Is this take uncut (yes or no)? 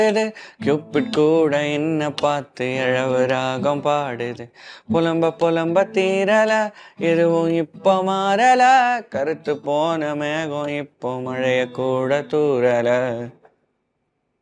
yes